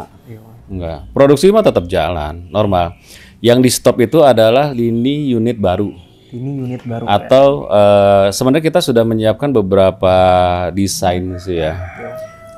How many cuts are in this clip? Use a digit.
0